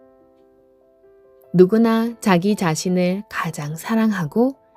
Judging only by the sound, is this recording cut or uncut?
uncut